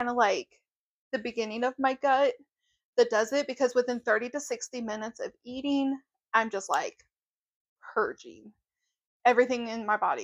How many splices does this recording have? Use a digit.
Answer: 0